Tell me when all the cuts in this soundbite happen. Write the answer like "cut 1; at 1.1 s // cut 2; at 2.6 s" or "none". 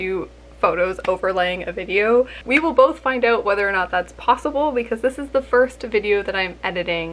cut 1; at 2.4 s